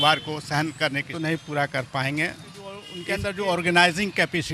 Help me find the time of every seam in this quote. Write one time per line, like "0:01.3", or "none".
0:01.1
0:02.9